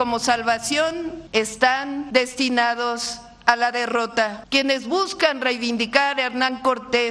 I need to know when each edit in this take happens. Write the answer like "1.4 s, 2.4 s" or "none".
1.2 s, 2.0 s, 4.4 s